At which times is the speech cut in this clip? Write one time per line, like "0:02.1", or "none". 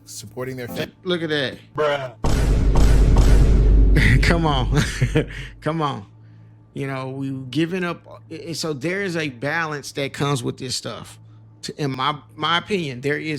0:11.9